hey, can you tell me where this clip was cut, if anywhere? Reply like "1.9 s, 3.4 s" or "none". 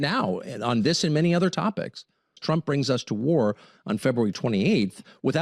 2.4 s